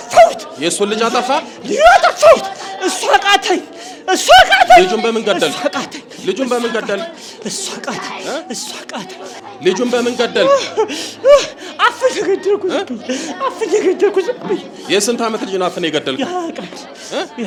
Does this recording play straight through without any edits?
yes; 0 cuts

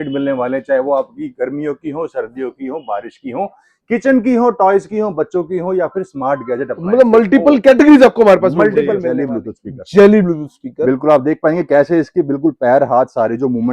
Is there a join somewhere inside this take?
yes; 1 cut; at 9.0 s

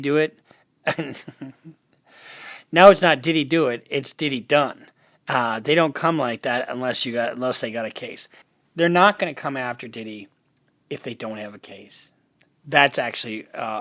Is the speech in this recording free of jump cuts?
yes; 0 cuts

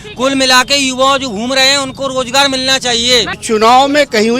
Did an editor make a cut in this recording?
yes; 1 cut; at 3.4 s

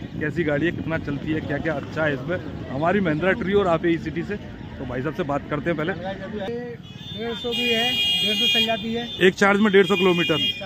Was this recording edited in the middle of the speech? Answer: yes; 1 cut; at 6.5 s

